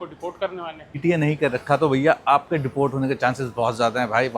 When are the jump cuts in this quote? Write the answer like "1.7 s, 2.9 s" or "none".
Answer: 0.9 s